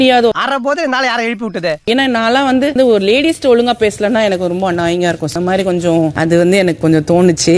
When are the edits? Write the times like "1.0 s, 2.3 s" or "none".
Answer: none